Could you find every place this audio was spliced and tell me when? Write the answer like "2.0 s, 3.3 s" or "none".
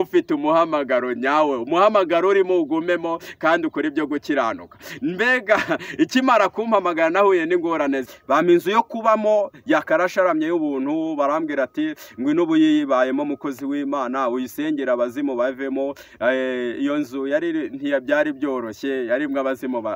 8.1 s